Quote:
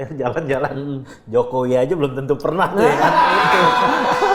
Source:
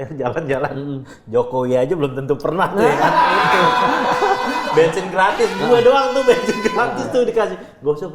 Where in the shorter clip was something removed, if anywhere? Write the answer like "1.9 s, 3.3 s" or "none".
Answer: none